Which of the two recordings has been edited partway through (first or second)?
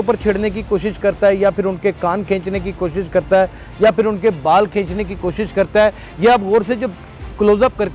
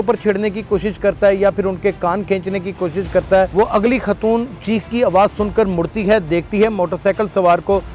second